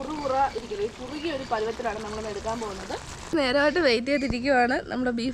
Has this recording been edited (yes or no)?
yes